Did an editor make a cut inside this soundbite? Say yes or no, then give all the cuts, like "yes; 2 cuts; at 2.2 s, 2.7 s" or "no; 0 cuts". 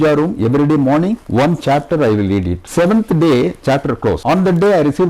yes; 3 cuts; at 1.2 s, 2.6 s, 4.2 s